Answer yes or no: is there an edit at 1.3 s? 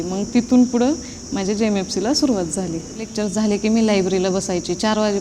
no